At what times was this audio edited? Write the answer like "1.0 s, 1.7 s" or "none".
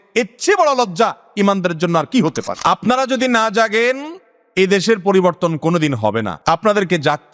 2.5 s, 6.3 s